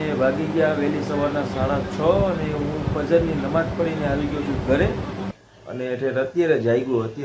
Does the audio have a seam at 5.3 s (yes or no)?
yes